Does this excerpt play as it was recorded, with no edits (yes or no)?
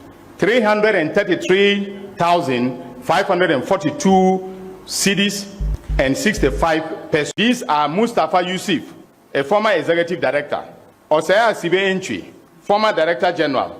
no